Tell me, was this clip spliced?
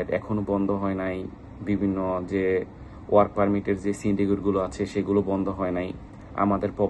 no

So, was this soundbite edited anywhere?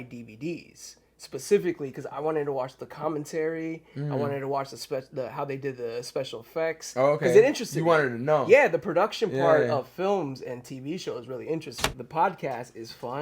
yes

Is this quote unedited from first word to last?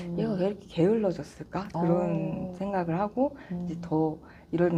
yes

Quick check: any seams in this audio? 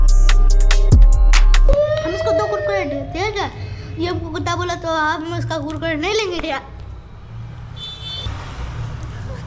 no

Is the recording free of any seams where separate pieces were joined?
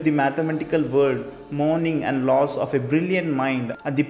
yes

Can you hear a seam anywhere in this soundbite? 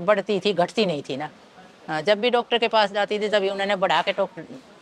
no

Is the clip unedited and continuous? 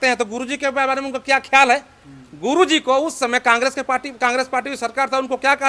yes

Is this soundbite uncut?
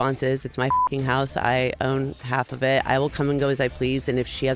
yes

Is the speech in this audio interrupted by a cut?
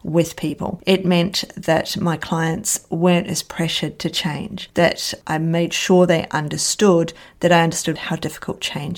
yes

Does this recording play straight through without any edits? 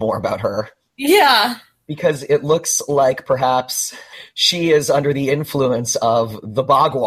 yes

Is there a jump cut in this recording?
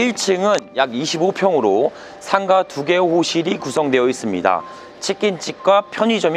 no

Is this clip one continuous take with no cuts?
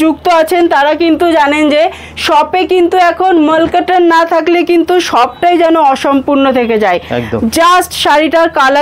yes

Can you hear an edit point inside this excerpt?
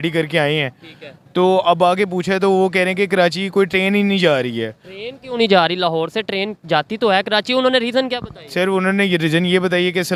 no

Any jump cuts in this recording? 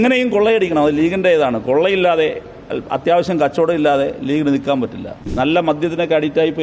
yes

